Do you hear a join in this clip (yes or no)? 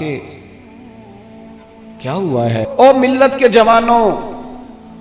yes